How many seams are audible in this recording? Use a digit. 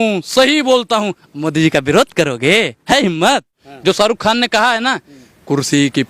1